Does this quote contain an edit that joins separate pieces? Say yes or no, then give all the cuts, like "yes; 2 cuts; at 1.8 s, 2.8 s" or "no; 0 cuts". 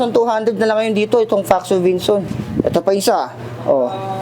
yes; 1 cut; at 2.4 s